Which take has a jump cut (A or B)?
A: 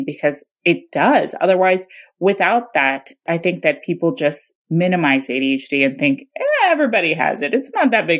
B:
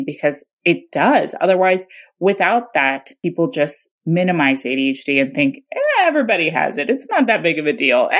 B